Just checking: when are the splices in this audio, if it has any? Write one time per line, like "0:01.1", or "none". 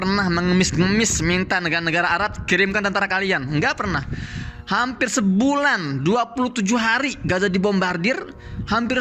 none

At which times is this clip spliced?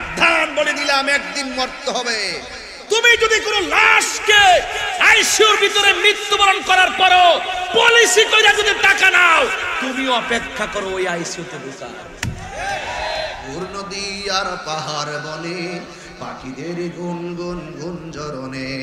0:13.4

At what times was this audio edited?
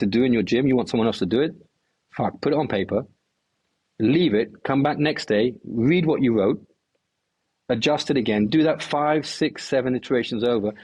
none

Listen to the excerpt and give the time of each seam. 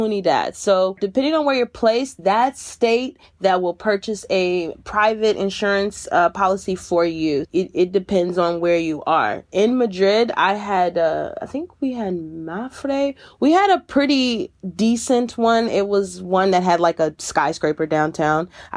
0:01.0

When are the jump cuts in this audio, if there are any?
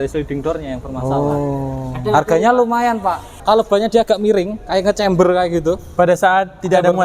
0:03.3

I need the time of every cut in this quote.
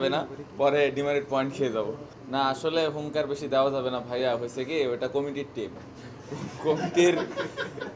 0:02.1

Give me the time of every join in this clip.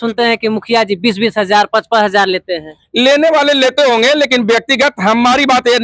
none

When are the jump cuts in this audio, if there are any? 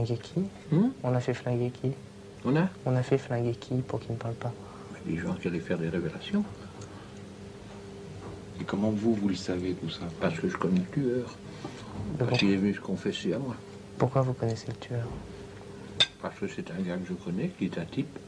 0:04.1

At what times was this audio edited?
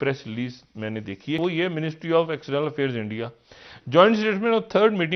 0:01.4

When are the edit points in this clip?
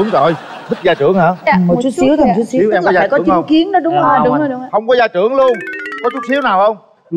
none

